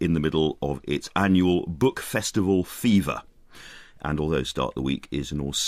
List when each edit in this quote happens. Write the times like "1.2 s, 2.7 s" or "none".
none